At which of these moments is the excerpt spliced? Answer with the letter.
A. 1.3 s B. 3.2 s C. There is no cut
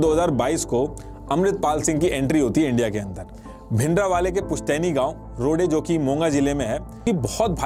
C